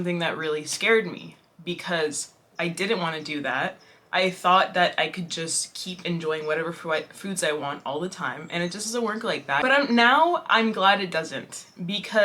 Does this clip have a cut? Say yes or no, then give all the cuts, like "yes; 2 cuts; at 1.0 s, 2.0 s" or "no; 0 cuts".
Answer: yes; 1 cut; at 9.6 s